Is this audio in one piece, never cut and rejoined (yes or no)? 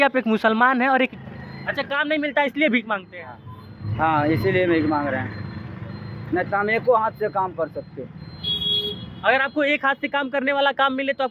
no